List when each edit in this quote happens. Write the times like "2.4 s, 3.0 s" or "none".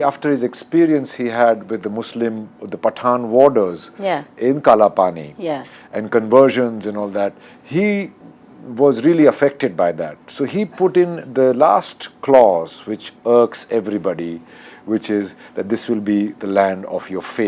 none